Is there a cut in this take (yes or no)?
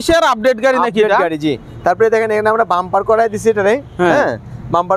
no